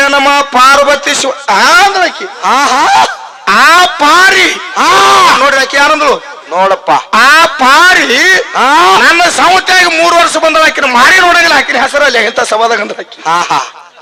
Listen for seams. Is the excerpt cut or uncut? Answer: uncut